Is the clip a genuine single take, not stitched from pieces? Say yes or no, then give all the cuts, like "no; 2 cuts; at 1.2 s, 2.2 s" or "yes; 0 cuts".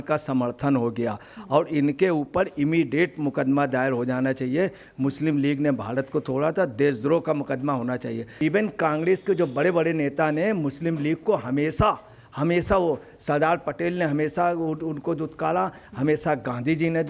no; 1 cut; at 8.3 s